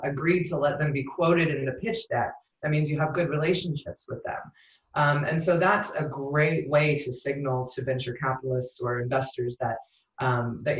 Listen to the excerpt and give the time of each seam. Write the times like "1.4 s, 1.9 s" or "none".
none